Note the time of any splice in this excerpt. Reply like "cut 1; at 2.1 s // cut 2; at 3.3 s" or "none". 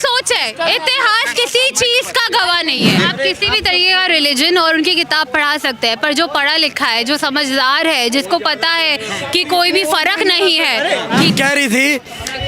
cut 1; at 3.0 s // cut 2; at 11.3 s